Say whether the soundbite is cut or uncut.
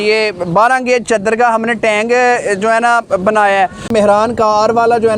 cut